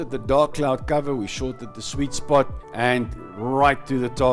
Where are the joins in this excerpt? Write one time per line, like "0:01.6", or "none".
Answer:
none